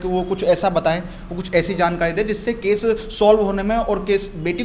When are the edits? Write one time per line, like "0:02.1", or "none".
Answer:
none

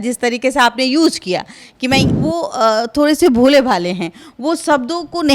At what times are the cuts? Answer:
0:02.1

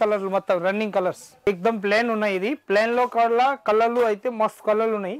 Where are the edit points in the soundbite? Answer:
0:01.5

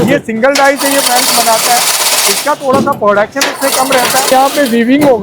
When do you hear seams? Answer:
0:04.3

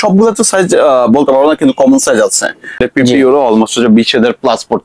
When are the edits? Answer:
0:02.9

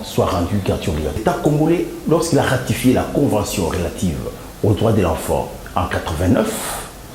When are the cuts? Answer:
0:01.2

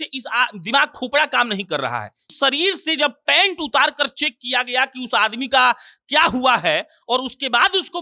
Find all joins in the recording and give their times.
0:02.3

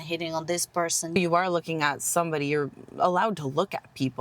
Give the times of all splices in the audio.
0:01.2

